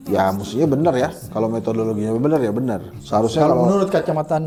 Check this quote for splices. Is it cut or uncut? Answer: uncut